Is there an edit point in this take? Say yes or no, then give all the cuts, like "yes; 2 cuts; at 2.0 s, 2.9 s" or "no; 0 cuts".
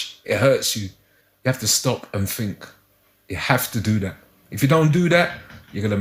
no; 0 cuts